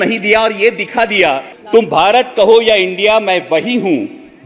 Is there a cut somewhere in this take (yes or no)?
yes